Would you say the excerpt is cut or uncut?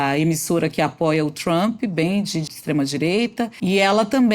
cut